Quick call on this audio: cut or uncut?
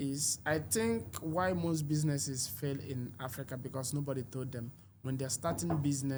uncut